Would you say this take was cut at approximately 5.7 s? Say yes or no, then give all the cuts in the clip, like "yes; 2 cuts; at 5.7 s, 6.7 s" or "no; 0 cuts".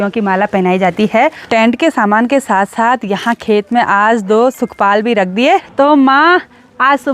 yes; 2 cuts; at 1.5 s, 5.7 s